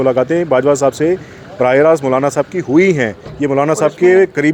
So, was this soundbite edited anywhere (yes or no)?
no